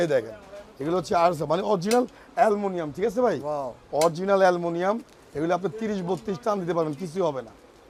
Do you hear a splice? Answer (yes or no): no